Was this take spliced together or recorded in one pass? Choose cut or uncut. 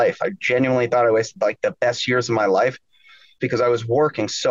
cut